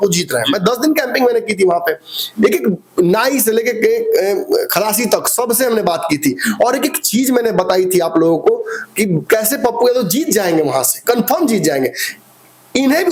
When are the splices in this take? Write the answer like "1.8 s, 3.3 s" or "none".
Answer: none